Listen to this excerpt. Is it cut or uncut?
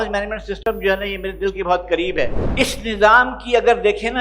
cut